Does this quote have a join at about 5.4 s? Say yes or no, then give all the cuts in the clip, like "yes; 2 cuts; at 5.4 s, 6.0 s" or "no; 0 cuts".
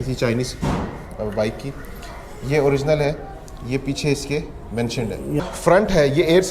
yes; 1 cut; at 5.4 s